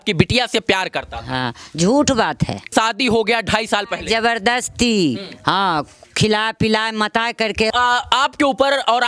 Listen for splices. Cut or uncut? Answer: cut